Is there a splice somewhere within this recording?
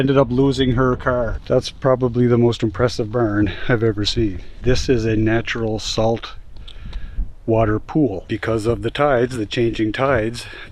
yes; 3 cuts; at 1.4 s, 4.5 s, 8.2 s

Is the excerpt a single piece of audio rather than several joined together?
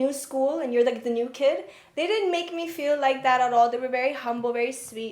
yes; 0 cuts

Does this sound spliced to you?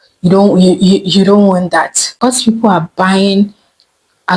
yes; 1 cut; at 2.0 s

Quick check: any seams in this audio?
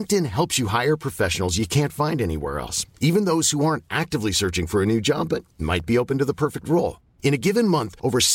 no; 0 cuts

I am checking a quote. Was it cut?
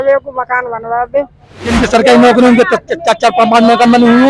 yes; 1 cut; at 1.7 s

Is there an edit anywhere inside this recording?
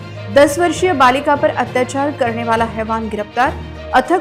no; 0 cuts

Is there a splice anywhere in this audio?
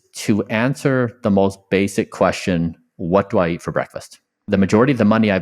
yes; 1 cut; at 4.4 s

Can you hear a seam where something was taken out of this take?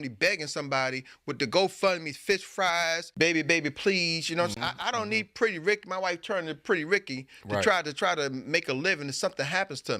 yes; 1 cut; at 3.1 s

